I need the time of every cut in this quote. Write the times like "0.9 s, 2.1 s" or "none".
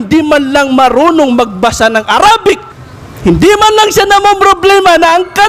none